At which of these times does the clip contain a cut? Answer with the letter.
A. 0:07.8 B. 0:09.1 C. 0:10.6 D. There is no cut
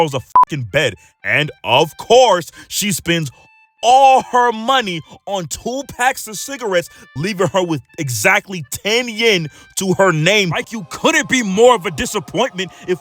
C